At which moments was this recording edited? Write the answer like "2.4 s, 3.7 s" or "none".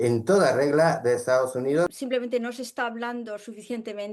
2.0 s